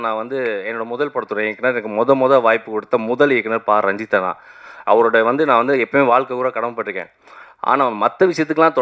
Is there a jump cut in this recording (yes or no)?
no